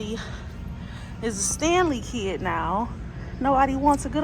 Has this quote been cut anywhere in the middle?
no; 0 cuts

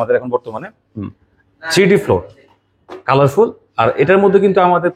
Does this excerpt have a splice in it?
no; 0 cuts

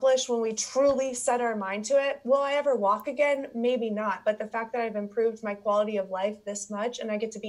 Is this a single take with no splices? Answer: yes; 0 cuts

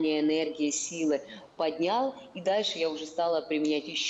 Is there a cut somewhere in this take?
no; 0 cuts

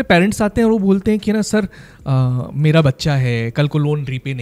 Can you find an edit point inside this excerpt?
no; 0 cuts

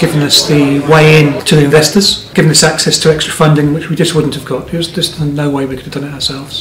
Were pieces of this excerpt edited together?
no; 0 cuts

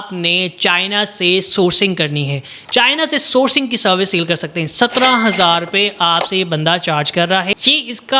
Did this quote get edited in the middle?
yes; 1 cut; at 2.5 s

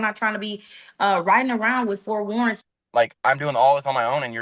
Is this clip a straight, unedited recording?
no; 1 cut; at 2.7 s

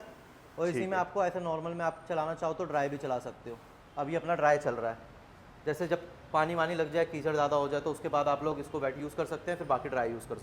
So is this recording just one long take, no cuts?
yes; 0 cuts

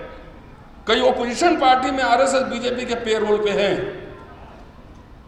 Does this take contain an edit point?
no; 0 cuts

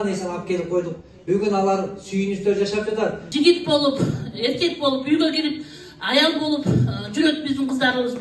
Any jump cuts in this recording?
yes; 1 cut; at 3.3 s

